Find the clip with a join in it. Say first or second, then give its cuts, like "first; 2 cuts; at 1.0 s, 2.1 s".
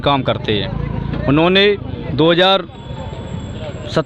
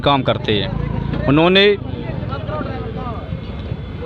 first; 1 cut; at 2.0 s